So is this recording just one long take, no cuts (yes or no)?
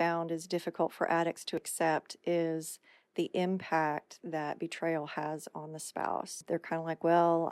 no